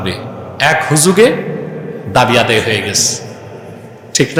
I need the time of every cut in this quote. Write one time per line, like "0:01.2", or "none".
none